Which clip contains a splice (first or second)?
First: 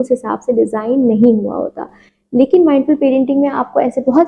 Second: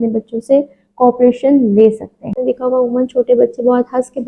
second